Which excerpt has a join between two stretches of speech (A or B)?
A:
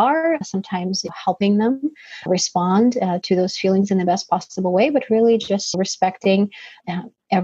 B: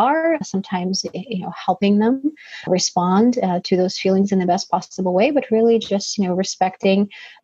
A